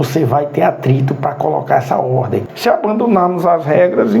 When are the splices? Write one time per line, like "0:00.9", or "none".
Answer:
0:02.5